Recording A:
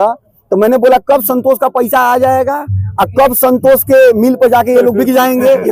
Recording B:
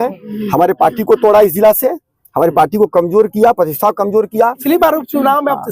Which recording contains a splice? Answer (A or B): B